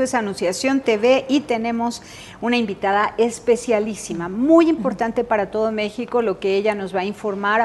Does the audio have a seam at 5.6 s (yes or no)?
no